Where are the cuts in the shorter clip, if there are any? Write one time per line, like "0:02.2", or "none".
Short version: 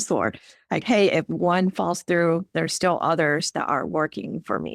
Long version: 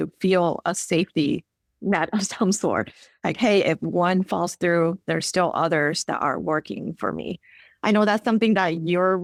none